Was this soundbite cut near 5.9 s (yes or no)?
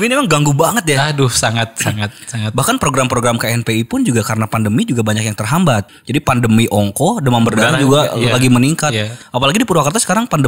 yes